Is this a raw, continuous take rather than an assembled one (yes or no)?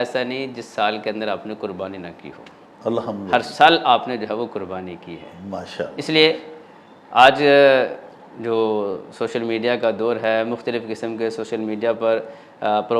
yes